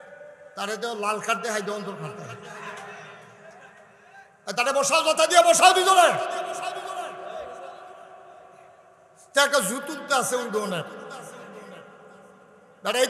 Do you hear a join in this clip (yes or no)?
no